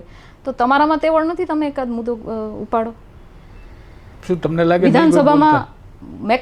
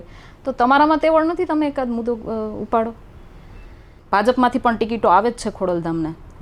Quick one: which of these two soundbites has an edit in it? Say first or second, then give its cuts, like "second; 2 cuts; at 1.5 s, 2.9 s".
second; 1 cut; at 4.0 s